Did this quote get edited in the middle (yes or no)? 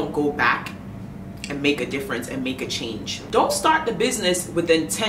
yes